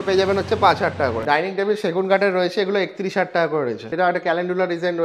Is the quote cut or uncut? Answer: cut